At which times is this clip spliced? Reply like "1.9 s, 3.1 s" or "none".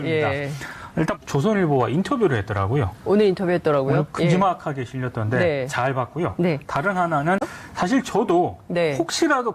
none